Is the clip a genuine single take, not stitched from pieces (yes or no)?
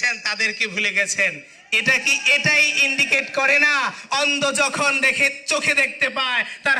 yes